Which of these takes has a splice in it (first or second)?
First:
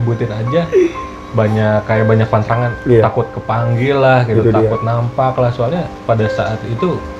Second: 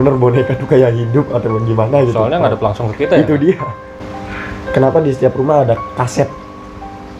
second